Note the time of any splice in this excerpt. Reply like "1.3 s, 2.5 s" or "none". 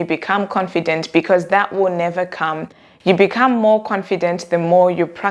none